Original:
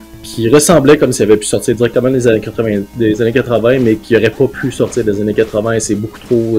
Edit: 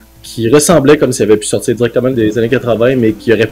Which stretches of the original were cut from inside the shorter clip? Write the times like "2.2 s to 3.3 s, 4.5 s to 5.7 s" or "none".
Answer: 2.1 s to 3.0 s